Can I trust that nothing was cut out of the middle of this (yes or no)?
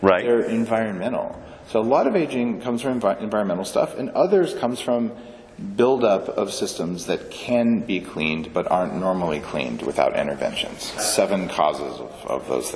no